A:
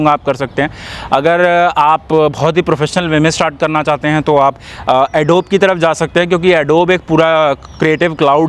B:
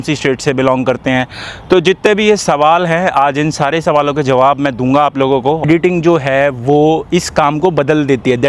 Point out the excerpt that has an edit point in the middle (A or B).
B